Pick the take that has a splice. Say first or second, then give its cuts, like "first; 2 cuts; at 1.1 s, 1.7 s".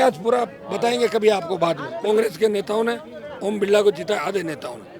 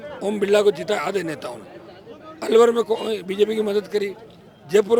first; 1 cut; at 1.9 s